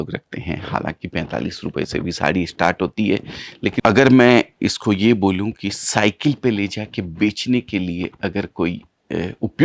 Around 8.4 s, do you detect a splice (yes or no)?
no